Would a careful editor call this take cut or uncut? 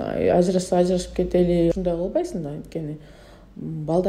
cut